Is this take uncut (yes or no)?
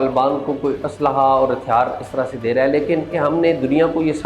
no